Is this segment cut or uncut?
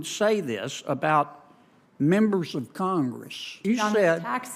cut